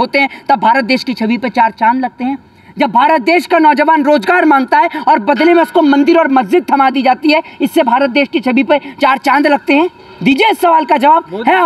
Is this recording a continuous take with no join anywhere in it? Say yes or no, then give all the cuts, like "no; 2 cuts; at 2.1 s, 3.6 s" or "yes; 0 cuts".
yes; 0 cuts